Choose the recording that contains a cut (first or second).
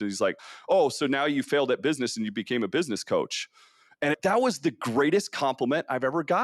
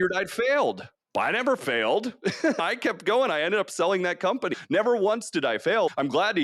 second